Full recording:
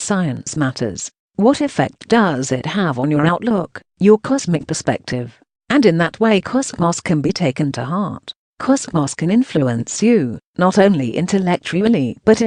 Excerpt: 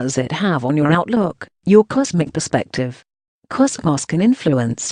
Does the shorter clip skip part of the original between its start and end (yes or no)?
yes